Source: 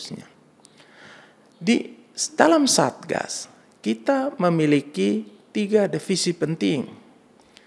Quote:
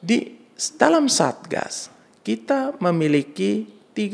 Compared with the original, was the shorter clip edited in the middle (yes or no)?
no